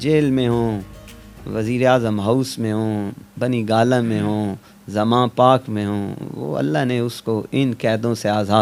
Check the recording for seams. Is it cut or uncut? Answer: uncut